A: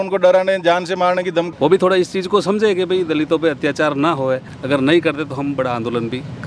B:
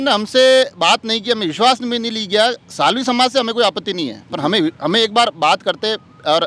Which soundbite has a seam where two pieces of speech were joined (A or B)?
A